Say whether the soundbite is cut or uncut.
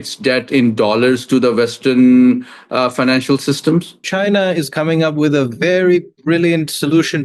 cut